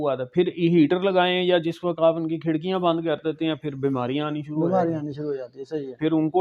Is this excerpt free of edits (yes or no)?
yes